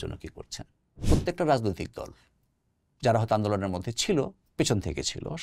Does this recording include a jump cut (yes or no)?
yes